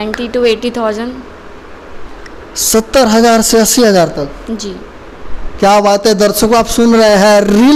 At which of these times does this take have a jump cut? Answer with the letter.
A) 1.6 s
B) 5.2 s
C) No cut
C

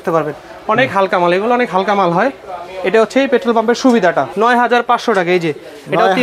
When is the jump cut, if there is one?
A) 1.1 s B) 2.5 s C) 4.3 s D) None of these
C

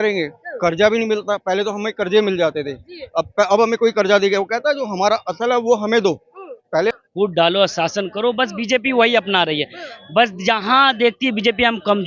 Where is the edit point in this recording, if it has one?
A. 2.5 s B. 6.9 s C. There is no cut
B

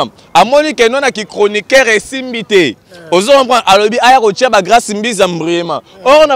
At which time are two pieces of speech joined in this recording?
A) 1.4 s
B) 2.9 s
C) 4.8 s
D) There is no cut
D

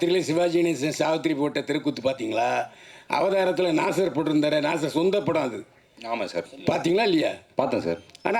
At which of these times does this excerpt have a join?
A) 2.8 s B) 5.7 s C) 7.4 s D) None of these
D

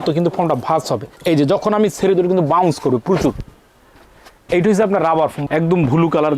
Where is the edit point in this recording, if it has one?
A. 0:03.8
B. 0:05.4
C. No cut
B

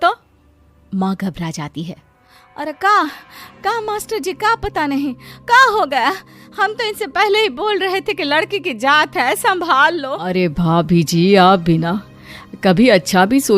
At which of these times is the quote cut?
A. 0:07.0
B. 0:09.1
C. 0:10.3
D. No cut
C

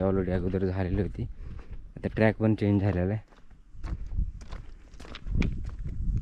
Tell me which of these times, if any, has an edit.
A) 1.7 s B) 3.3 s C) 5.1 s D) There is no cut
D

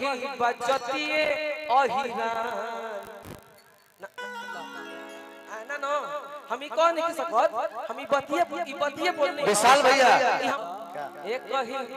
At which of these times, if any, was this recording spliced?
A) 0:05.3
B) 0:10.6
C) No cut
B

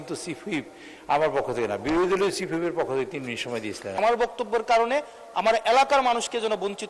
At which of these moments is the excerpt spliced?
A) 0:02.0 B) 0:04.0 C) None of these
B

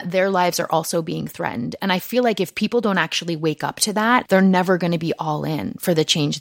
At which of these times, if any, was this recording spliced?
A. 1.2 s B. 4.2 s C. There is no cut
B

